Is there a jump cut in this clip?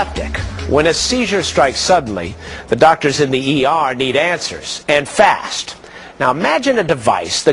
yes; 1 cut; at 5.3 s

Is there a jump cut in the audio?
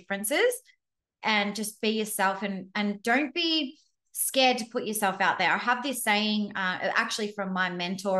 no; 0 cuts

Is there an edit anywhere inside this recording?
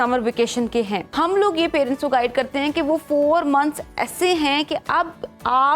yes; 1 cut; at 1.1 s

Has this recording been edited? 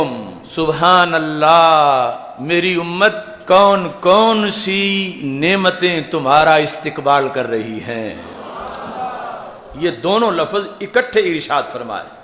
no; 0 cuts

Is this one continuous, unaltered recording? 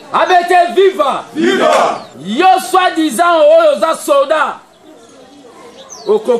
no; 1 cut; at 2.1 s

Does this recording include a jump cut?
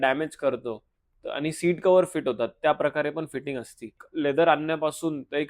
yes; 1 cut; at 4.0 s

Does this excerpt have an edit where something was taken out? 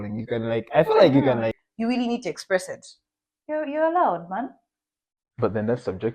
yes; 1 cut; at 1.6 s

